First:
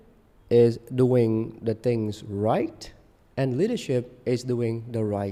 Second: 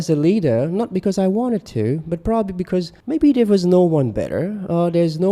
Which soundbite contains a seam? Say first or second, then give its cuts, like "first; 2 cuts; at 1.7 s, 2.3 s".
second; 1 cut; at 3.0 s